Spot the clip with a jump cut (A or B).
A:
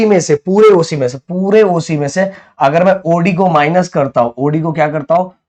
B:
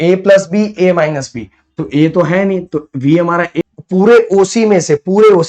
B